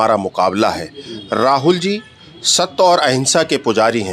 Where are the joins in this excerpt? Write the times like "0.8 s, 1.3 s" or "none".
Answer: none